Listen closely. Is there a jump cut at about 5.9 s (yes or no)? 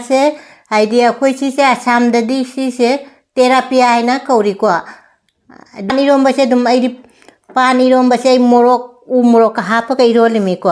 yes